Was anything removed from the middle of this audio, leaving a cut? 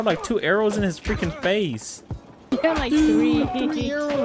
yes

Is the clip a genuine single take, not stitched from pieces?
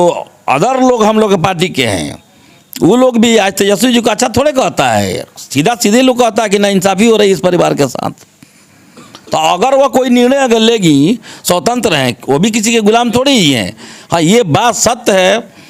yes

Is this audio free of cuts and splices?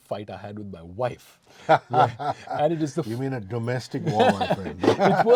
yes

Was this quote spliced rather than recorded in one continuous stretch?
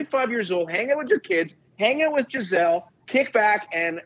yes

